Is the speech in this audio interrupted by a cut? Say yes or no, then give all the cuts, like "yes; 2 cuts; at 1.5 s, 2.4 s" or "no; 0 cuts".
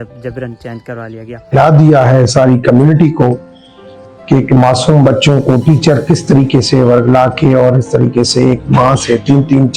yes; 1 cut; at 1.5 s